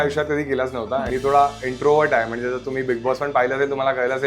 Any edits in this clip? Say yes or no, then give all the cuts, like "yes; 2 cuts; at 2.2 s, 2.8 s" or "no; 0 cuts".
yes; 1 cut; at 1.1 s